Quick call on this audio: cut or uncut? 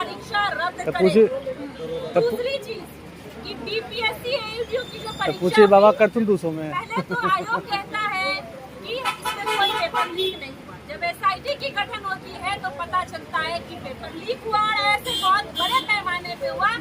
uncut